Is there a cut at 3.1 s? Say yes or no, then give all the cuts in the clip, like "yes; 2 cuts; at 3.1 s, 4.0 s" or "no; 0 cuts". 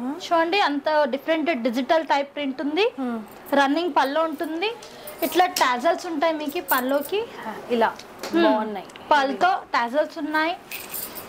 no; 0 cuts